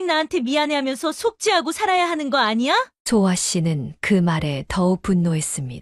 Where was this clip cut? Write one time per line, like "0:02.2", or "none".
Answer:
none